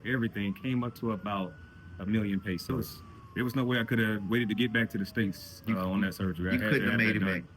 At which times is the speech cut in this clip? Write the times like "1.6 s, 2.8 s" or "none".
2.7 s